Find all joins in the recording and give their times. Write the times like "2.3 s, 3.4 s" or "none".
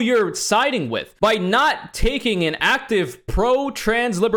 none